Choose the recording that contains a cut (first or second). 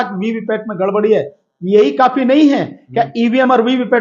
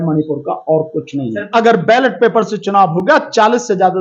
second